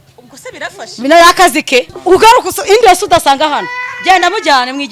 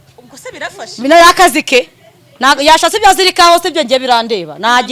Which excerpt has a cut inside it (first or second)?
first